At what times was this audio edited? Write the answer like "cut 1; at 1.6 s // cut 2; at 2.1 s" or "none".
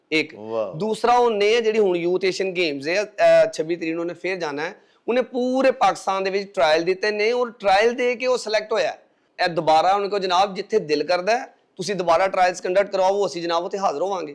cut 1; at 9.2 s